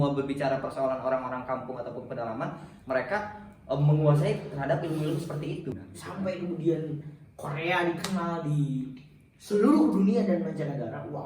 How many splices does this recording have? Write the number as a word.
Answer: one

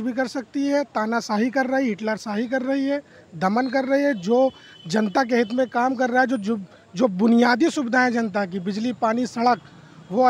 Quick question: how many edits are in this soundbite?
zero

